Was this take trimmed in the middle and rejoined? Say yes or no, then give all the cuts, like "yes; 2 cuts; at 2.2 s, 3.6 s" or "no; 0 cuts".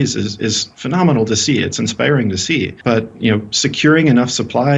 yes; 1 cut; at 2.8 s